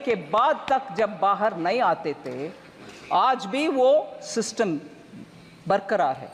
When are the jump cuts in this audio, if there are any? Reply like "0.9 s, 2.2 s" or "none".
none

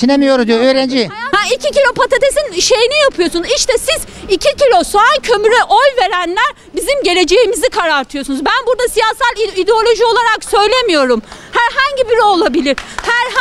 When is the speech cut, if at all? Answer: 1.2 s

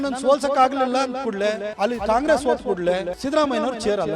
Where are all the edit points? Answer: 1.7 s, 3.1 s

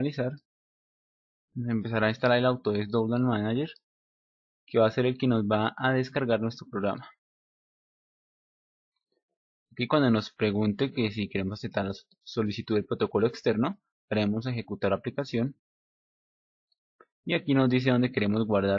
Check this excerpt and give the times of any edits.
13.4 s

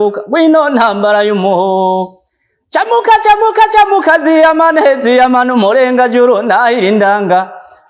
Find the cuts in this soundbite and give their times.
none

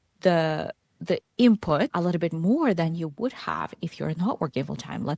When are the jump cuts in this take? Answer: none

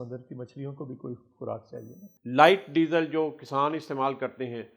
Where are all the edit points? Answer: 2.0 s

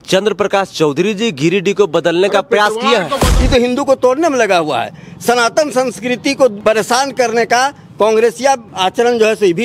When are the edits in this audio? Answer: 3.3 s, 6.6 s, 8.7 s

